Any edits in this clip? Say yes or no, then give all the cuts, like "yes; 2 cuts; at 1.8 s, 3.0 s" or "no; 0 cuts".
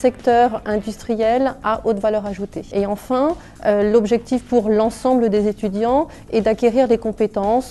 yes; 1 cut; at 3.2 s